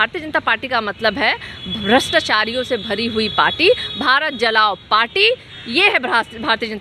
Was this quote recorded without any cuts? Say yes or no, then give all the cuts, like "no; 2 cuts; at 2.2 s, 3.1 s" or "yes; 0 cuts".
yes; 0 cuts